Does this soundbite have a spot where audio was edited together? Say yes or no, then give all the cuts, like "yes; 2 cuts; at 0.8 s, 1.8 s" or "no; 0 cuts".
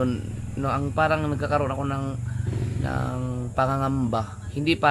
no; 0 cuts